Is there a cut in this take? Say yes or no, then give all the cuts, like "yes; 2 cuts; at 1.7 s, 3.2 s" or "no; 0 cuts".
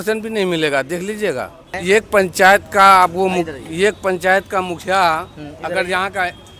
no; 0 cuts